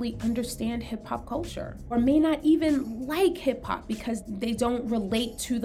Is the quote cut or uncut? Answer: cut